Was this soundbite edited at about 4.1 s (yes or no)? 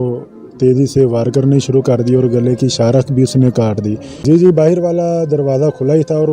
yes